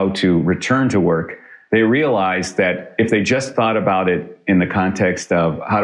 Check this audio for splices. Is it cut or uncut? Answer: cut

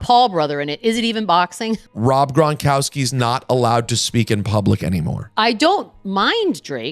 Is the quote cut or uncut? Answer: cut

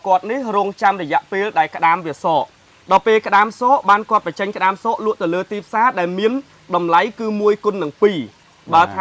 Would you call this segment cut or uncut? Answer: uncut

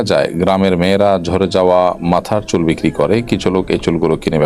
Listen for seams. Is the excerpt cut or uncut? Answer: uncut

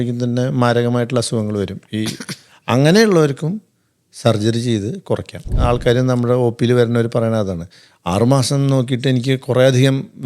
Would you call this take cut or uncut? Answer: cut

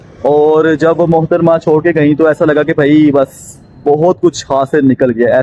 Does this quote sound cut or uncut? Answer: uncut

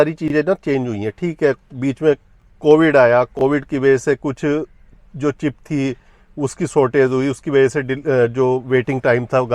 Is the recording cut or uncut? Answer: uncut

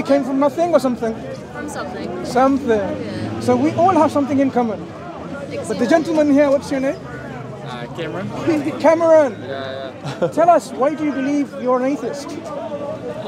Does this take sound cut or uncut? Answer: uncut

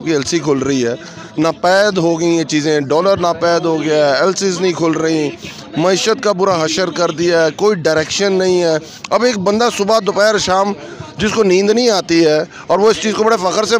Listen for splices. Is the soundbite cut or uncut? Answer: cut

